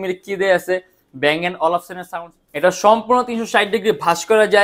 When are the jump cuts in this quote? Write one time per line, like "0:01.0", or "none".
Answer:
0:02.0